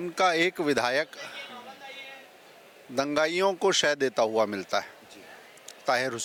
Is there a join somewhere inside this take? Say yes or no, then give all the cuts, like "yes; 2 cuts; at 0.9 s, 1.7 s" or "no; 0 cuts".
no; 0 cuts